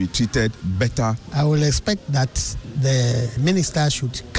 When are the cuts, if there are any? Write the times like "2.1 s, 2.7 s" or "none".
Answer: 1.2 s, 3.4 s